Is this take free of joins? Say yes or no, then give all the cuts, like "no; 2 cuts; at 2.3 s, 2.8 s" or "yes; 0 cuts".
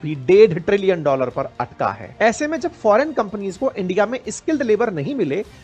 no; 1 cut; at 2.0 s